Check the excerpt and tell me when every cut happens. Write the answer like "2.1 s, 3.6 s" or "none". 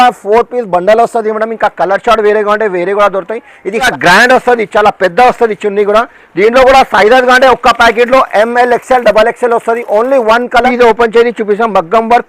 3.9 s, 10.7 s